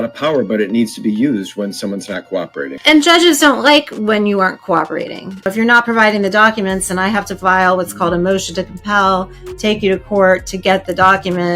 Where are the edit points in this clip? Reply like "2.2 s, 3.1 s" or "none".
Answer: 2.7 s, 5.4 s

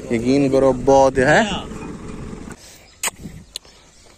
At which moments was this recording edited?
2.6 s

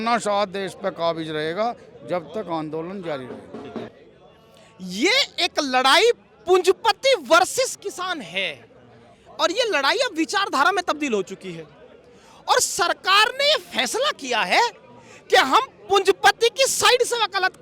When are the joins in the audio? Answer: 3.9 s

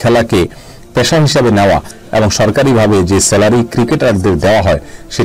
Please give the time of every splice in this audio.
none

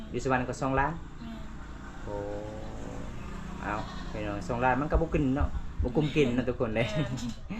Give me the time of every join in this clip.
none

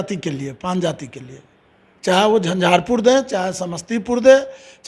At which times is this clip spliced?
none

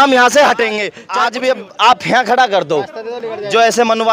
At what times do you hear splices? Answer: 0.9 s

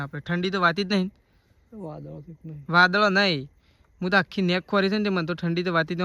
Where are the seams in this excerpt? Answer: none

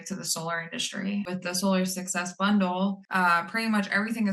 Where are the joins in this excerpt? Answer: 1.3 s, 3.0 s

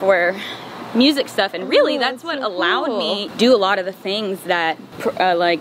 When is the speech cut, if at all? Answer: none

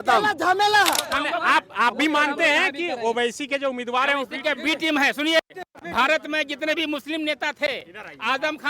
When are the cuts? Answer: 1.0 s

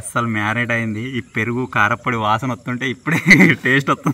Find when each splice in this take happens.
none

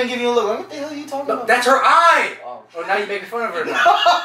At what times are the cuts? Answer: none

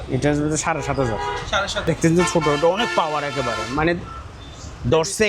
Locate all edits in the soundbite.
1.9 s

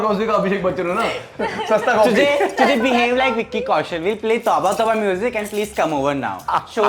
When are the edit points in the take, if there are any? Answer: none

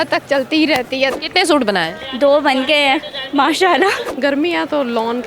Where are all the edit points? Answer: 1.1 s, 4.1 s

